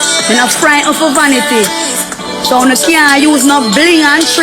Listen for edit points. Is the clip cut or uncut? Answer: cut